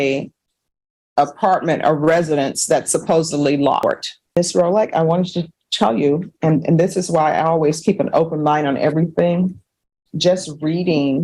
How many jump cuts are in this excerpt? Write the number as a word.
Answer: one